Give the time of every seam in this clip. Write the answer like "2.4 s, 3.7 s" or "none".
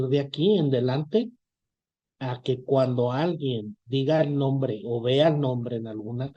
none